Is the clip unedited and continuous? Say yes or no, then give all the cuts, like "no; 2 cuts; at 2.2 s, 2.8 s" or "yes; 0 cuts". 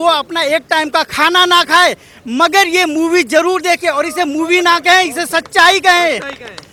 yes; 0 cuts